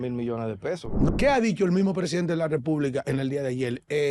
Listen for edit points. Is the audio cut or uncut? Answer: cut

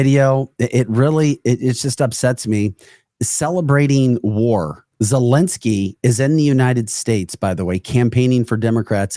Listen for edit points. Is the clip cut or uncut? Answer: cut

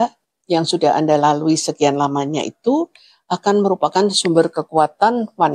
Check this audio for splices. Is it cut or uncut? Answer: uncut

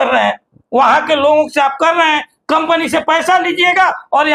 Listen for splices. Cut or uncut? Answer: uncut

